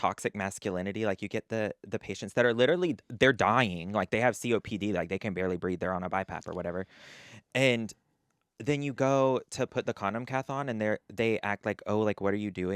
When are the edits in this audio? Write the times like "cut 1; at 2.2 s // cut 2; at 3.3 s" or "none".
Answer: none